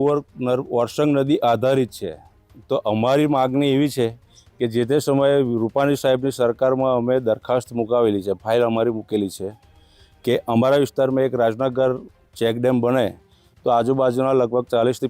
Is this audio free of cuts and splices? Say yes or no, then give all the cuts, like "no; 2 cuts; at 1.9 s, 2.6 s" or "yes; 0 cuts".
yes; 0 cuts